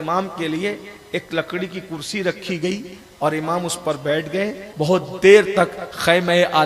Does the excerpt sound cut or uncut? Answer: cut